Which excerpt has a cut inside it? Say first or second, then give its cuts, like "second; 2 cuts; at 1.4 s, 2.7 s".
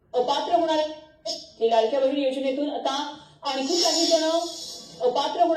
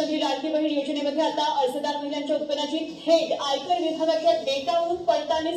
first; 1 cut; at 0.9 s